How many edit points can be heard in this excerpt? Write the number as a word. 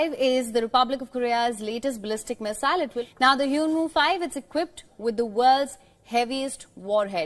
zero